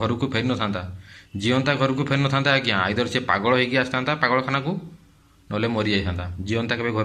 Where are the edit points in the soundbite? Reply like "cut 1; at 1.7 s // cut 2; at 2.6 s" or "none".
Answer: none